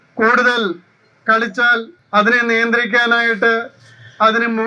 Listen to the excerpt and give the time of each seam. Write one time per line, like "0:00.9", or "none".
0:02.0